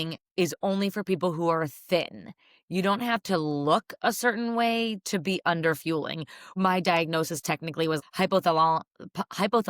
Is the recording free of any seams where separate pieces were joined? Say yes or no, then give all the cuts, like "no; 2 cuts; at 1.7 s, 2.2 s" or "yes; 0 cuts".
no; 2 cuts; at 6.5 s, 8.0 s